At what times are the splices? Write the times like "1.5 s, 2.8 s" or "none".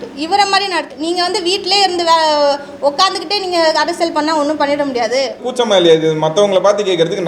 0.9 s, 5.4 s